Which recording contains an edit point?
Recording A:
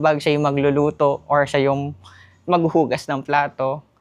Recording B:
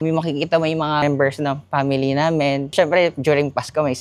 B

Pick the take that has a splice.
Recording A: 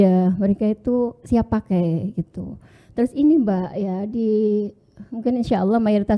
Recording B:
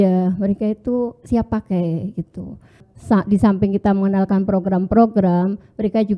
B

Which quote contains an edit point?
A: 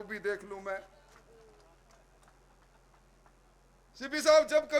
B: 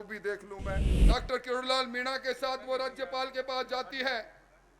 B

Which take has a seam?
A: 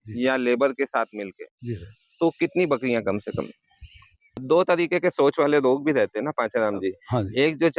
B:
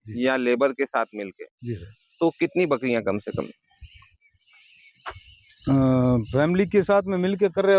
A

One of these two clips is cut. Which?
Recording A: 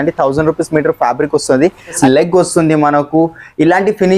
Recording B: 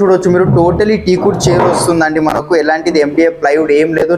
A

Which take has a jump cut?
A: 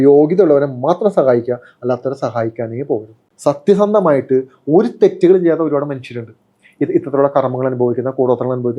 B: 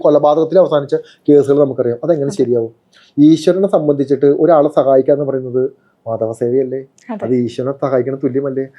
A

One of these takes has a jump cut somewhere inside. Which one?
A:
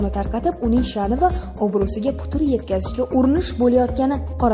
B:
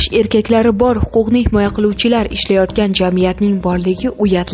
A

